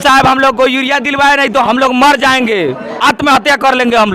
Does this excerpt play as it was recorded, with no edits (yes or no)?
no